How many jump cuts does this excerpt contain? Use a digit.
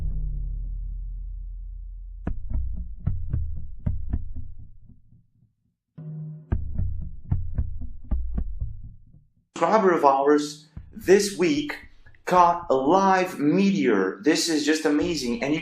1